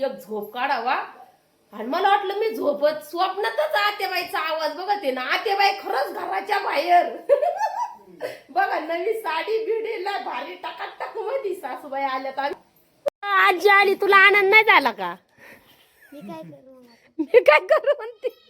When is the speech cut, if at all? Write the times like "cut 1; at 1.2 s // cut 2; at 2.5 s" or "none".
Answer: cut 1; at 13.1 s